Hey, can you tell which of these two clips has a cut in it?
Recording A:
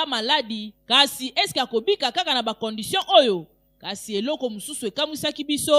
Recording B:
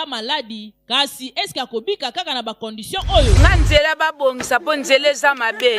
B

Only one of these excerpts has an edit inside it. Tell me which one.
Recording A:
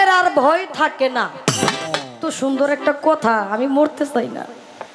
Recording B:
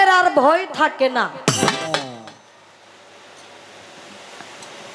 A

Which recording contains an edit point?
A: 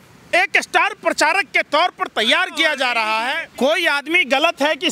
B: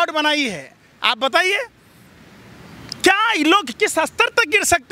A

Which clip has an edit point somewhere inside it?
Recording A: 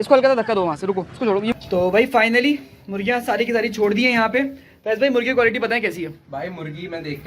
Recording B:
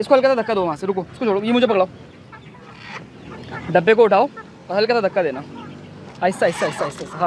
A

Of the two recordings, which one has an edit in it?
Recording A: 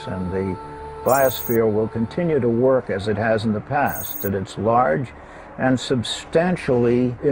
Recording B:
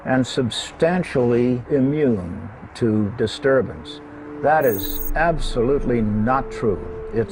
A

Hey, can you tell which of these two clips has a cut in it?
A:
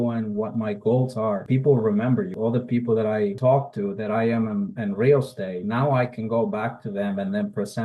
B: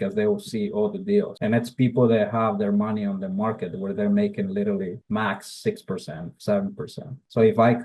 A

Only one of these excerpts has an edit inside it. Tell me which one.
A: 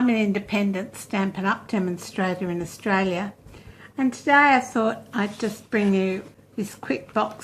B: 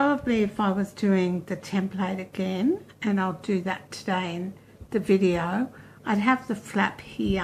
A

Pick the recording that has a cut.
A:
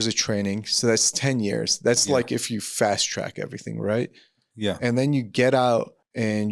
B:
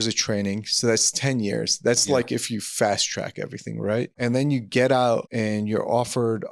B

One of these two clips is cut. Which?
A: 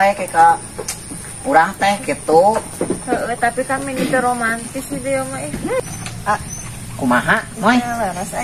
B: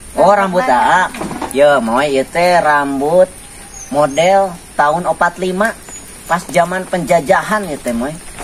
A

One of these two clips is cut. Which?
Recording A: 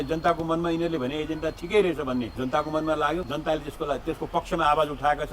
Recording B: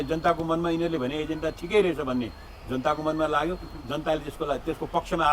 A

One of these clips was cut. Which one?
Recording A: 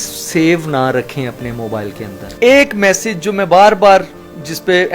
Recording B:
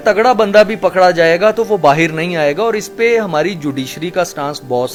A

